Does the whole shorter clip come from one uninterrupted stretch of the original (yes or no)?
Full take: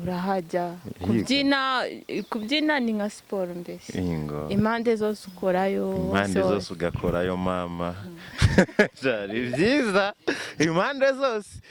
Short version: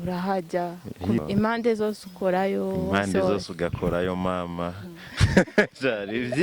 no